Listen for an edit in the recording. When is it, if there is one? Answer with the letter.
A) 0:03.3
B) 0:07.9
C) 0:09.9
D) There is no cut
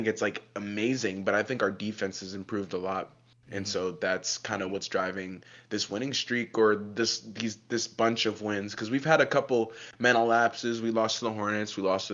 D